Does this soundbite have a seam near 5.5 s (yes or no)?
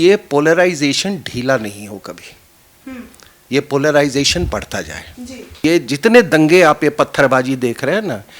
yes